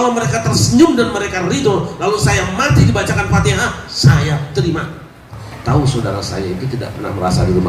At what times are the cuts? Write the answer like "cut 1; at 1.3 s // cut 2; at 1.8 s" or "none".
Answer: cut 1; at 5.5 s